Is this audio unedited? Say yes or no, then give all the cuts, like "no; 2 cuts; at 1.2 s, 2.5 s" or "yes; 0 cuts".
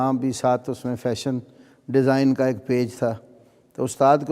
yes; 0 cuts